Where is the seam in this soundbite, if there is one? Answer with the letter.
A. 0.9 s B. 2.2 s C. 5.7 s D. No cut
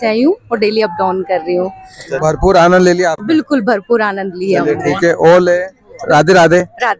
B